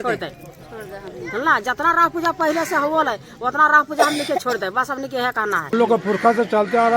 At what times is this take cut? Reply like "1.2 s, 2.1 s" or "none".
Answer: 5.7 s

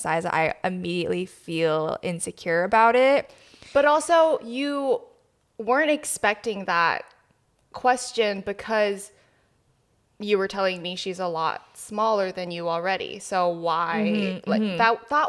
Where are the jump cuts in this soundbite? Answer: none

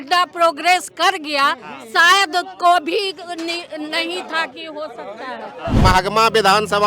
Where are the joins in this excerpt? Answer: 5.8 s

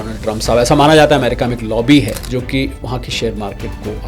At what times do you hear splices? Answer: 2.2 s

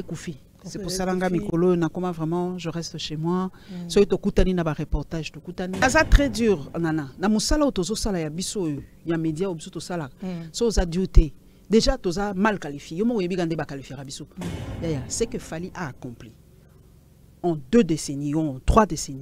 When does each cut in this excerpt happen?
5.8 s, 14.6 s

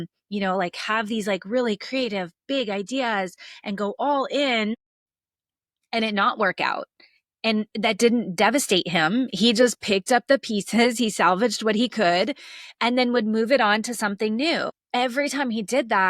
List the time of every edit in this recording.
none

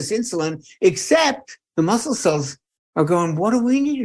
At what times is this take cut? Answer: 1.5 s

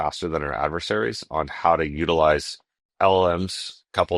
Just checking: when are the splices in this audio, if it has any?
2.8 s

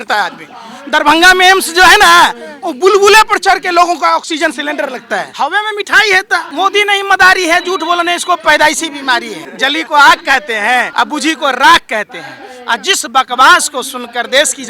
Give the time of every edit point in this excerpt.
5.3 s, 6.5 s, 9.4 s, 10.9 s

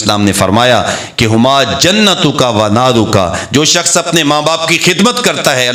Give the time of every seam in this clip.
none

